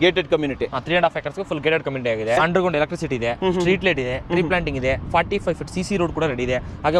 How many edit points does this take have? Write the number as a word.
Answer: one